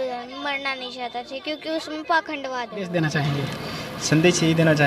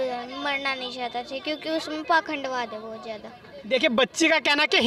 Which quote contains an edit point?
first; 1 cut; at 3.1 s

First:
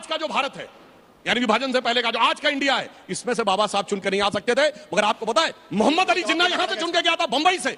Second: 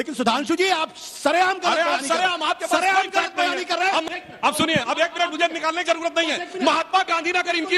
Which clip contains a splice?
second; 1 cut; at 4.0 s

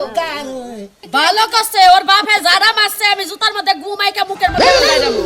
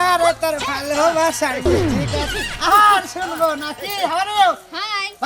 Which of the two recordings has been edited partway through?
first; 1 cut; at 1.1 s

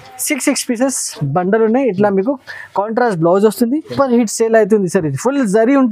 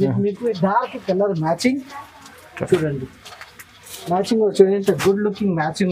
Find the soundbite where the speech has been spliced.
first; 1 cut; at 3.9 s

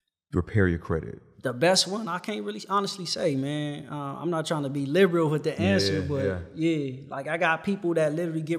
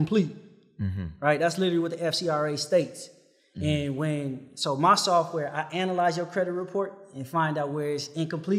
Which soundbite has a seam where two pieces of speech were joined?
first; 1 cut; at 1.2 s

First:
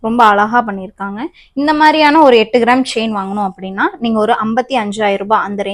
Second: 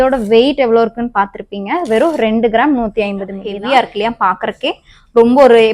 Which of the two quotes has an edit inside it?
second; 1 cut; at 3.5 s

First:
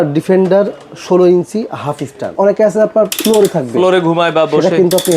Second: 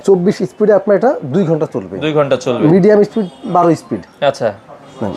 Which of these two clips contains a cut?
first; 1 cut; at 2.3 s

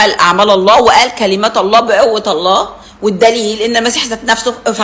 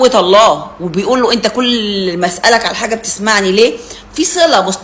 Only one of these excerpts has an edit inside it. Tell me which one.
second; 1 cut; at 1.1 s

